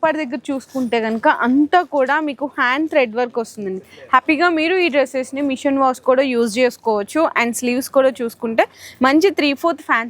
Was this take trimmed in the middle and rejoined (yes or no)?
no